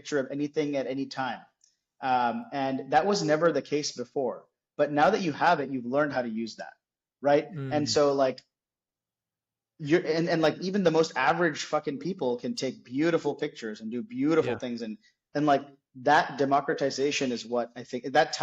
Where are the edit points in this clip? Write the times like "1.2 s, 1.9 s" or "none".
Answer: none